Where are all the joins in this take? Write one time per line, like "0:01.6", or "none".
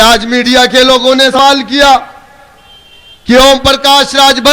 0:01.4